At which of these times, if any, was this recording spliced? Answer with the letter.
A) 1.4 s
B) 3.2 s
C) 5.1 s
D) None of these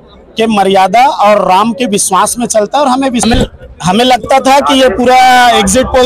B